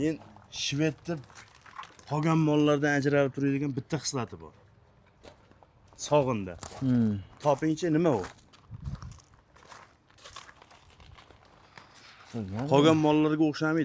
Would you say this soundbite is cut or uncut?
uncut